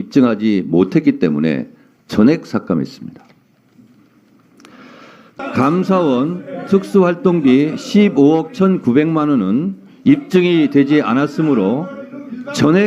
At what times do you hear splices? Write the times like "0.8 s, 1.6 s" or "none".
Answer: 5.4 s